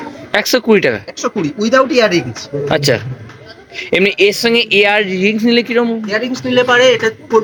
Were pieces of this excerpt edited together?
no; 0 cuts

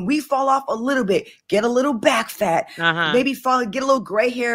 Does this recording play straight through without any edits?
yes; 0 cuts

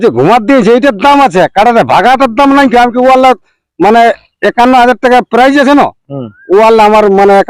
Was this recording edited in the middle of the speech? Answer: no; 0 cuts

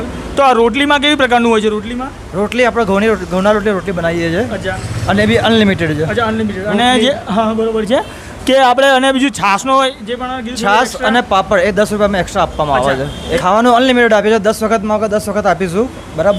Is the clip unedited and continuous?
no; 1 cut; at 13.4 s

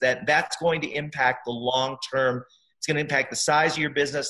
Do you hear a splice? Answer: no; 0 cuts

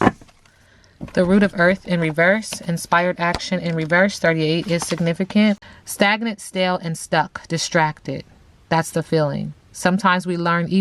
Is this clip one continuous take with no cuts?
no; 1 cut; at 5.8 s

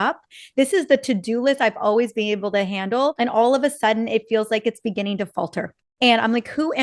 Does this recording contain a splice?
yes; 1 cut; at 3.1 s

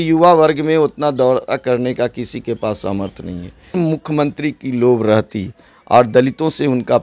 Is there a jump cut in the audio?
yes; 1 cut; at 3.7 s

